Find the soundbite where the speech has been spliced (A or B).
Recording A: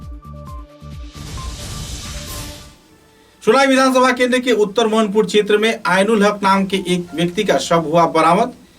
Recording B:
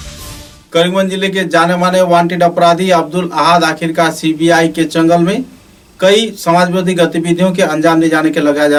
A